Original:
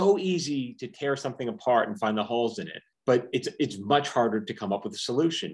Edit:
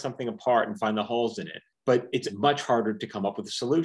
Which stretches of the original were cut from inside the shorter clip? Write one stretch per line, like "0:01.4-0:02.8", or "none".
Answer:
0:03.5-0:03.8